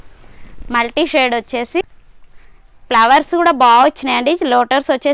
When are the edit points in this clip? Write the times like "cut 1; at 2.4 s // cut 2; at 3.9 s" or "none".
none